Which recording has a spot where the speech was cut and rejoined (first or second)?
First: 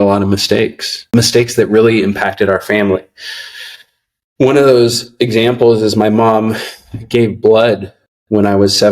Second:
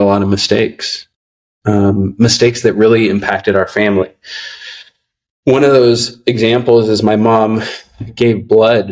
first